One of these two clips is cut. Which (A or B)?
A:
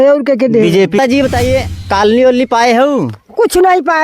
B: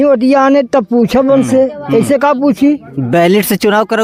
A